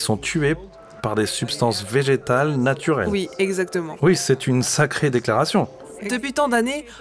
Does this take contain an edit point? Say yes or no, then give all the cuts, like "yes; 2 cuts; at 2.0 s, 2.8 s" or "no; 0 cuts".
yes; 1 cut; at 5.9 s